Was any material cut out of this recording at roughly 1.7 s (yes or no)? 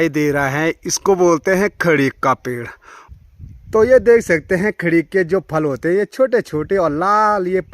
no